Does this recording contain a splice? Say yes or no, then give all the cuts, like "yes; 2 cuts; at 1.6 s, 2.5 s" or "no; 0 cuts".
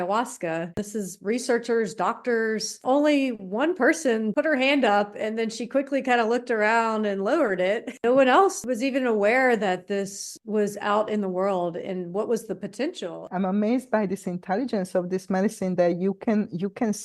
yes; 6 cuts; at 0.8 s, 2.8 s, 4.3 s, 8.0 s, 8.6 s, 13.3 s